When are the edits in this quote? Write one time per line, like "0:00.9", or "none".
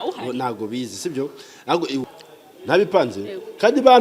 0:02.0